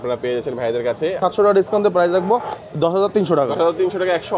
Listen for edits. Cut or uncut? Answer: cut